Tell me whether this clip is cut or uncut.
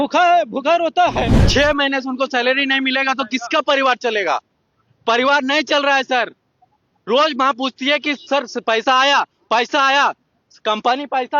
cut